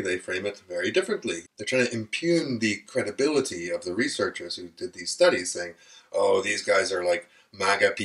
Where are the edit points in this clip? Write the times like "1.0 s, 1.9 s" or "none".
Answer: 1.4 s